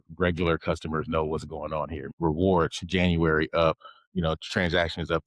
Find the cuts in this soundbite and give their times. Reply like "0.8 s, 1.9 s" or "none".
2.0 s